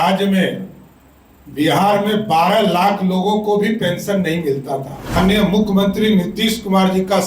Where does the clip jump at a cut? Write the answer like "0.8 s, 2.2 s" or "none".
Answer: 5.2 s